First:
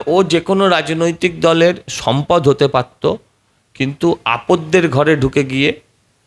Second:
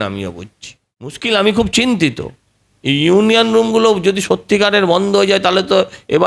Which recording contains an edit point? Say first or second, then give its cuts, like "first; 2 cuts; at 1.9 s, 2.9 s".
second; 1 cut; at 1.2 s